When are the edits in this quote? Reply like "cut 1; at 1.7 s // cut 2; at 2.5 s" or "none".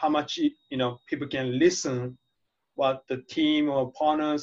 none